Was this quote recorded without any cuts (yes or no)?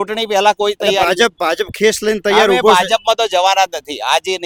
yes